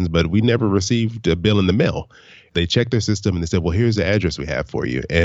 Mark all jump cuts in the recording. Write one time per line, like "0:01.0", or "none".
0:02.5